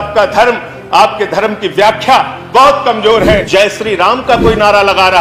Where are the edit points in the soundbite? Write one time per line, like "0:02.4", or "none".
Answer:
0:03.4